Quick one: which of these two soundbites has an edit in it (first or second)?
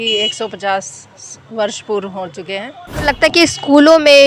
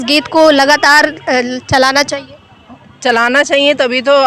first